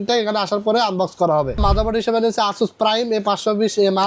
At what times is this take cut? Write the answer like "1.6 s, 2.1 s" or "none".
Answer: 1.6 s

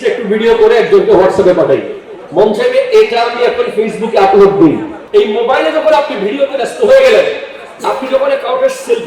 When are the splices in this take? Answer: 4.9 s

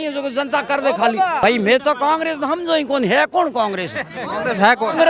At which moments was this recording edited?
1.4 s

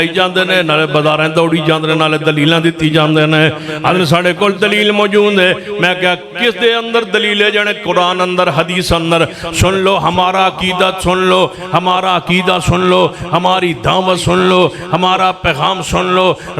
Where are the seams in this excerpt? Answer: none

